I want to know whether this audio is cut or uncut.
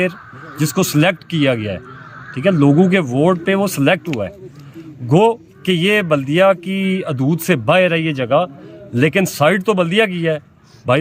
uncut